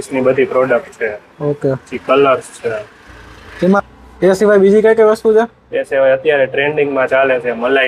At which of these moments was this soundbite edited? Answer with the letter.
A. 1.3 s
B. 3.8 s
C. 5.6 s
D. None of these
B